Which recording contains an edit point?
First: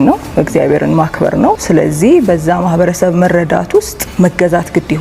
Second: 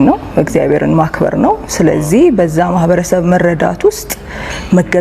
first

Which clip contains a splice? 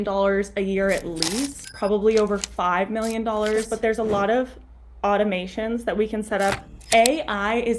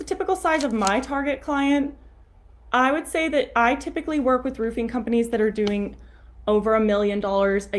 first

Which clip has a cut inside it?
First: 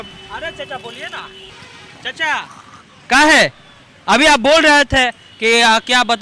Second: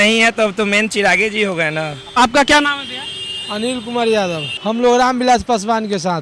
second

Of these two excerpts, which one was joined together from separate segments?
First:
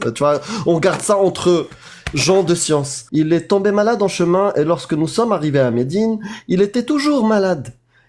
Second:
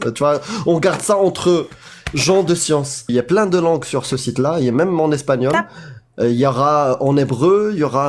first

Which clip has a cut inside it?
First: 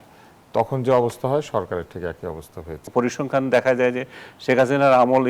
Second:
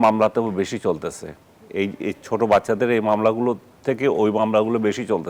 first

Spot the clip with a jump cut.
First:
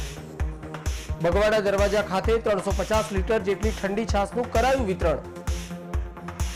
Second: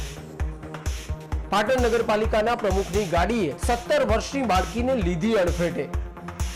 second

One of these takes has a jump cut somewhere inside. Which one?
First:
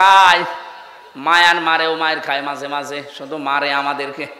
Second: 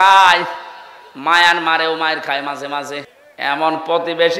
second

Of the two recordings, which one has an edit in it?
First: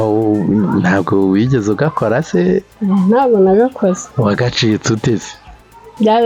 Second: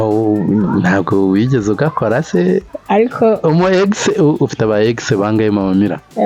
second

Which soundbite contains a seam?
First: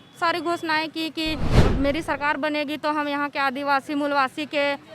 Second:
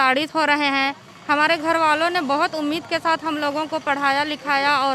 first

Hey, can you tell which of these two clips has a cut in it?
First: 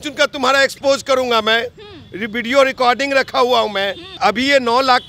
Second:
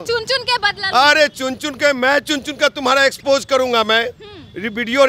first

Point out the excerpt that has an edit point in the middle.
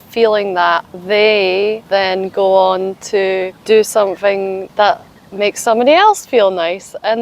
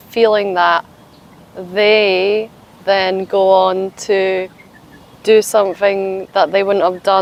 first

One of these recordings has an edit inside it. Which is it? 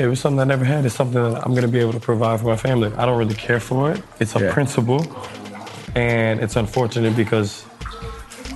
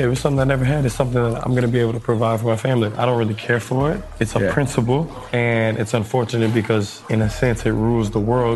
second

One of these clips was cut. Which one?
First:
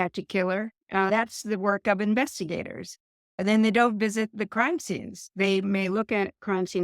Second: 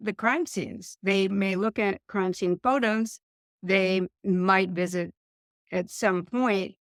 first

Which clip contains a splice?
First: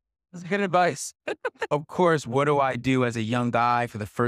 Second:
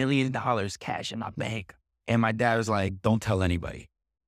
first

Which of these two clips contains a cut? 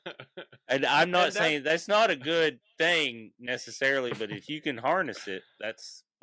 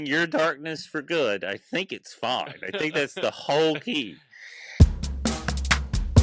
second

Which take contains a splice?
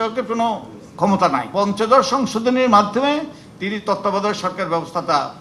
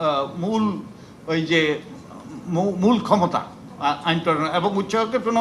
first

